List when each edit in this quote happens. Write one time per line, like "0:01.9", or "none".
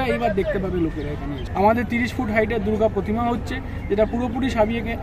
0:01.4